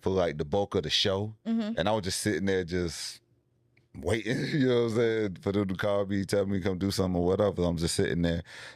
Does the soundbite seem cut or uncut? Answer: uncut